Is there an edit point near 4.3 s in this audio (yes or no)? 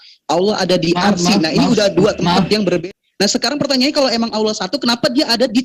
no